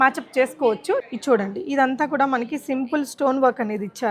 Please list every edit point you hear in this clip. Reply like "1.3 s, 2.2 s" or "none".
1.0 s

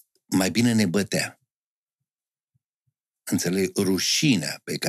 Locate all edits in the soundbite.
none

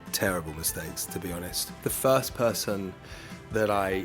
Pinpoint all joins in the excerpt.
1.6 s

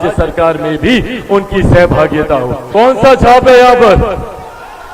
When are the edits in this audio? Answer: 2.6 s

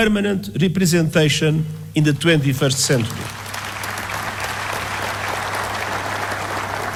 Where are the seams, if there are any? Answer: none

